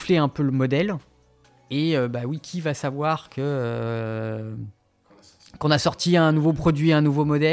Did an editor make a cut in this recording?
no; 0 cuts

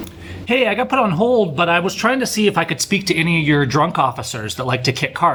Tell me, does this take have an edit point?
no; 0 cuts

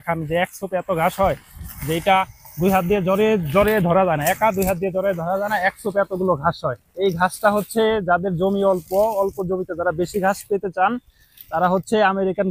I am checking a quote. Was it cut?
no; 0 cuts

